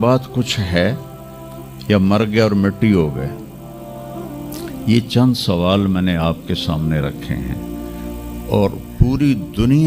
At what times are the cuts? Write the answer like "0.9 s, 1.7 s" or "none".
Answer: none